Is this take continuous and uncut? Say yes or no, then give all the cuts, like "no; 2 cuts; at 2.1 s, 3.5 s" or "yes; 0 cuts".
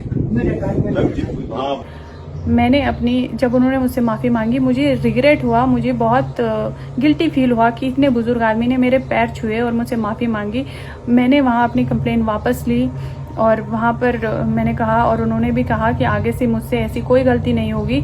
no; 1 cut; at 1.8 s